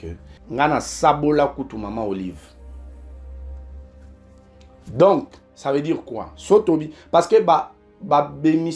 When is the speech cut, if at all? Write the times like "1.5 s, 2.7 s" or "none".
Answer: none